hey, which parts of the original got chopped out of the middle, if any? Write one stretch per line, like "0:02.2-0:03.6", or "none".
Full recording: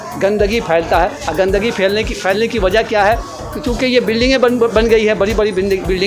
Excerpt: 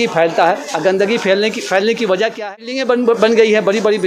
0:03.0-0:04.0